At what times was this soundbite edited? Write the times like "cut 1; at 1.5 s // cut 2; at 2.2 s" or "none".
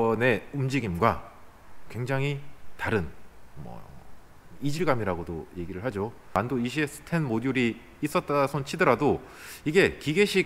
cut 1; at 6.3 s